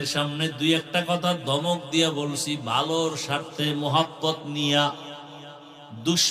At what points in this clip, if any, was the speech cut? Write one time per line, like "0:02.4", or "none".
none